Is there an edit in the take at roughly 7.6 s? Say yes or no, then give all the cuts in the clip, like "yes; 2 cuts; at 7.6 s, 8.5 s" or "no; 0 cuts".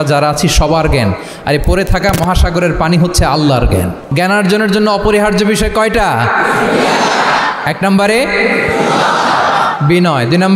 no; 1 cut; at 4.1 s